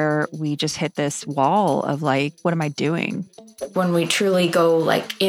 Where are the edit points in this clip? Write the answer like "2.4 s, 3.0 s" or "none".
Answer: 2.4 s, 3.5 s